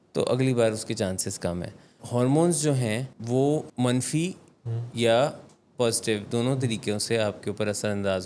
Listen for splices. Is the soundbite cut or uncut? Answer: cut